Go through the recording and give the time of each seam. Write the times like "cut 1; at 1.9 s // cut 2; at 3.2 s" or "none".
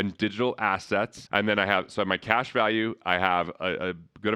cut 1; at 1.2 s